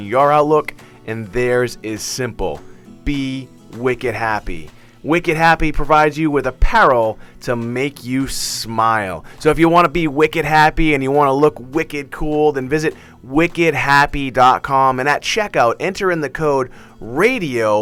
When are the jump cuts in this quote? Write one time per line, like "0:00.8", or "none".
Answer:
none